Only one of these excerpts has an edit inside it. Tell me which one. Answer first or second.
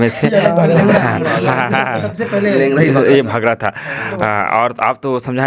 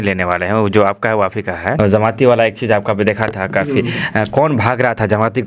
second